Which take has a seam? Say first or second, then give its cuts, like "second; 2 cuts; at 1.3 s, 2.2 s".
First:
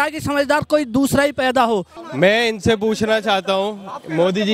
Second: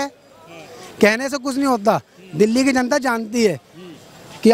first; 1 cut; at 2.0 s